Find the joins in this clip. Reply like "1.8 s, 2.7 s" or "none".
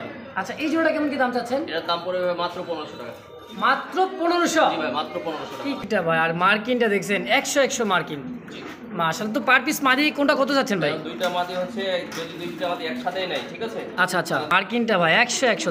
5.8 s, 14.5 s